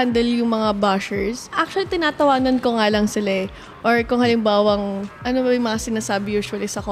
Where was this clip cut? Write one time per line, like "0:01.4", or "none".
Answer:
0:01.6
0:05.2